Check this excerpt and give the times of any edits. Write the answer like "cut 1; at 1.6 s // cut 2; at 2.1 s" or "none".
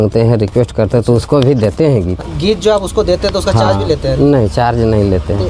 cut 1; at 2.2 s